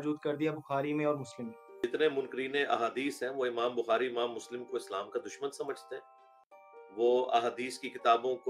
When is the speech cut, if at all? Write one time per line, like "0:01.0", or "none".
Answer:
0:01.6